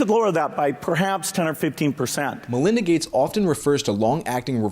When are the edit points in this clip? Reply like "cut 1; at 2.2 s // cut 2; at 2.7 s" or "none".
cut 1; at 2.4 s